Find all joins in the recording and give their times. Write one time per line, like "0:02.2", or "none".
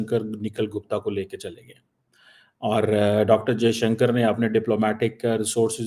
none

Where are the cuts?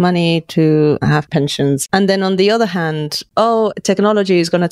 0:01.5
0:03.2

